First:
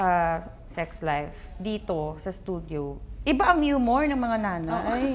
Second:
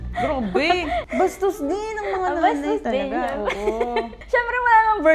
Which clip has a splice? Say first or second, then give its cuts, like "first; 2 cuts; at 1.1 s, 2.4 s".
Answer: second; 2 cuts; at 1.1 s, 4.2 s